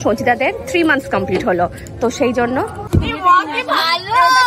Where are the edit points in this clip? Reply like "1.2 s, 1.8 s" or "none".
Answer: 2.8 s

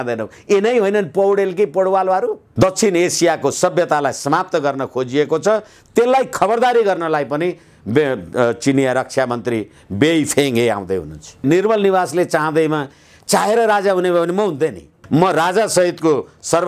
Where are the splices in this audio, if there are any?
2.4 s, 11.4 s, 14.9 s

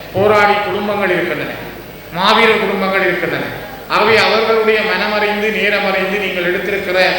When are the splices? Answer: none

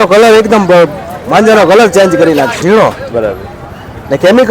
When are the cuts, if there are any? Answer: 2.6 s

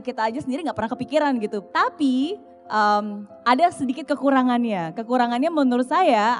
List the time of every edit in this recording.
1.6 s, 2.5 s

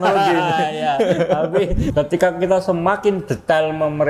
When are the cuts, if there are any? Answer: 1.8 s

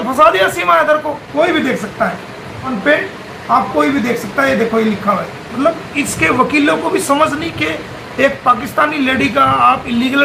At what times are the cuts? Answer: 1.2 s

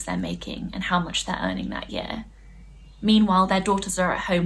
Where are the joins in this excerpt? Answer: none

